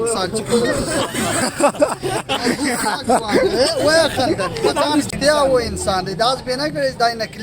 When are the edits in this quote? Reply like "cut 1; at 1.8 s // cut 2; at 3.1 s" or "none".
cut 1; at 5.1 s